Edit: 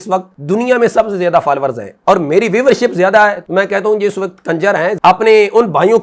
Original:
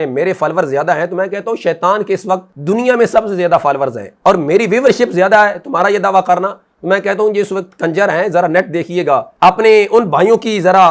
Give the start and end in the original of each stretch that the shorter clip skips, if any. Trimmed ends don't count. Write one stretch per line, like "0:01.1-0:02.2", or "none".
0:05.6-0:06.8
0:08.3-0:09.3